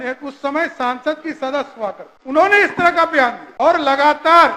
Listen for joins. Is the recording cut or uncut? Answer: cut